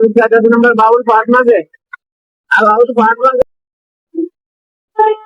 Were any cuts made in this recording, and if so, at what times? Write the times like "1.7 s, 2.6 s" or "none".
3.4 s